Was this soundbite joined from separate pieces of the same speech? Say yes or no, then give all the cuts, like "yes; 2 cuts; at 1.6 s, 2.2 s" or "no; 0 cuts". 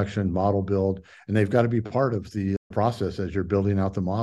yes; 1 cut; at 2.7 s